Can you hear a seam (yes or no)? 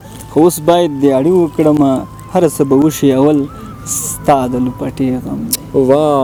no